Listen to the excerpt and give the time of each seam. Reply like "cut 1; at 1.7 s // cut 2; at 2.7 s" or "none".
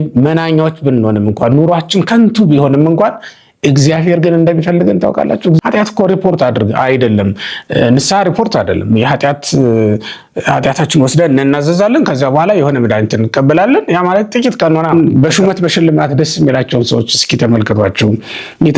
cut 1; at 5.6 s // cut 2; at 14.9 s